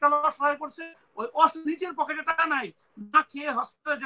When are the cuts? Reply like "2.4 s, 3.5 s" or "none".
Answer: none

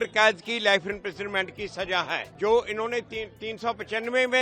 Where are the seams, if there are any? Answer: 2.2 s

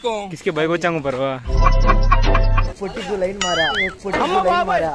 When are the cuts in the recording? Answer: 2.7 s

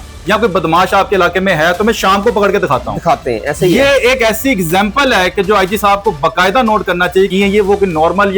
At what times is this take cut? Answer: 7.3 s

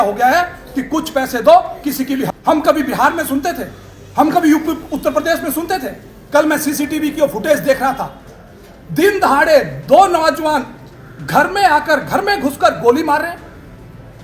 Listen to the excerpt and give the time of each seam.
2.3 s

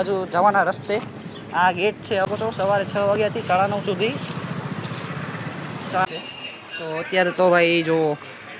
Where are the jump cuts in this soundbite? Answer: 2.2 s, 6.1 s

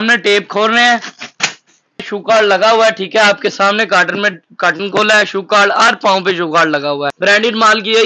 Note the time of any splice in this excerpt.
2.1 s, 7.1 s

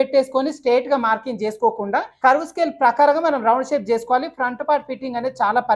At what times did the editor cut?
2.1 s

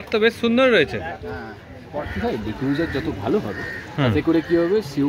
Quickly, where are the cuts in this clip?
2.0 s

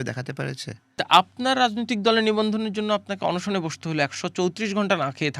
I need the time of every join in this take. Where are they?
1.0 s

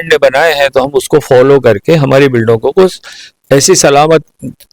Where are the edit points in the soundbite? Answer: none

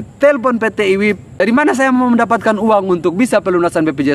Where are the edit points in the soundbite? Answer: 1.3 s

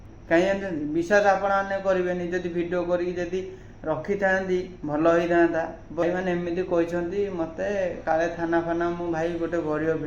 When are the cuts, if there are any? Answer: 6.0 s

